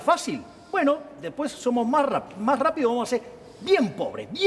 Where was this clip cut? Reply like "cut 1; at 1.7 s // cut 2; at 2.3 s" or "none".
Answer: none